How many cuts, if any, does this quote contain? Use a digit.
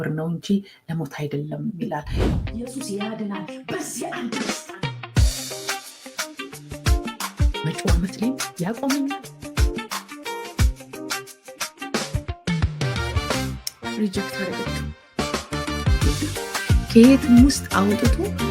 1